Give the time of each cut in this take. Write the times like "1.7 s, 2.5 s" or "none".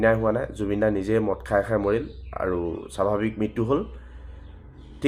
none